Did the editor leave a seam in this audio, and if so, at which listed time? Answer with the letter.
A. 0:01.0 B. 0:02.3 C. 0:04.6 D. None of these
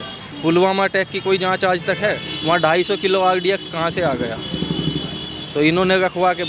B